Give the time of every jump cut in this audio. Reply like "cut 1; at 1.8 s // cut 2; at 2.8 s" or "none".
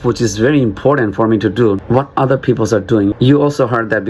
cut 1; at 1.8 s // cut 2; at 3.1 s